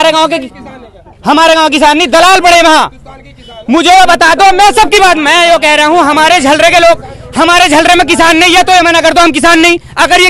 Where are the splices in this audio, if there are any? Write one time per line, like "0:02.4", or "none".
none